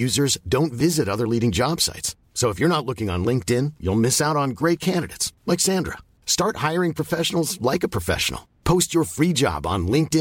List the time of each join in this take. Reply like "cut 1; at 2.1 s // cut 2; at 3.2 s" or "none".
none